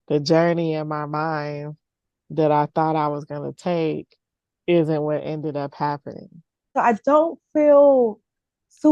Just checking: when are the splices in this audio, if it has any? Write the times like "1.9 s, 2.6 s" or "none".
6.7 s